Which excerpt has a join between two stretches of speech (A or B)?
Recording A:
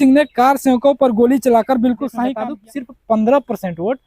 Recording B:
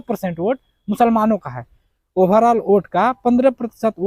A